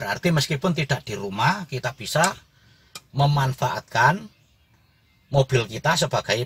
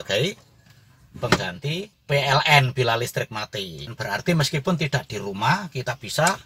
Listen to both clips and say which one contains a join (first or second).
second